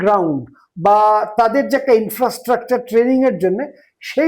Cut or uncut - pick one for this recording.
uncut